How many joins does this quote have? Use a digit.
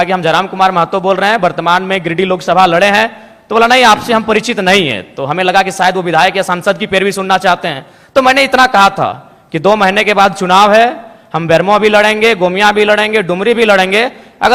0